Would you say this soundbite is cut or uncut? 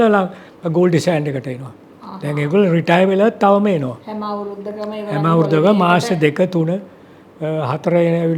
uncut